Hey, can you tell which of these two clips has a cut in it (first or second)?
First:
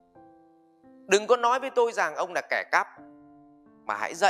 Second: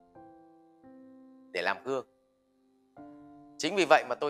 first